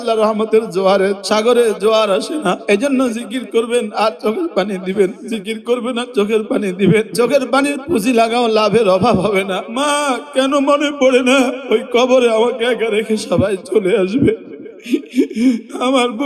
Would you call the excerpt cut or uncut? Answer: cut